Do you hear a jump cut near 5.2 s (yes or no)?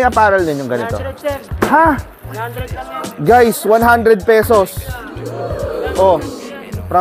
no